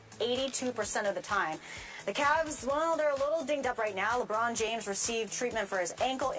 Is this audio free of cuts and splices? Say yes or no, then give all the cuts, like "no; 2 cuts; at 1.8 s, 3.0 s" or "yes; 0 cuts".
no; 1 cut; at 1.7 s